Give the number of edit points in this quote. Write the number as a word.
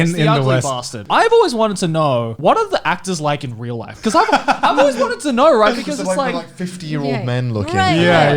two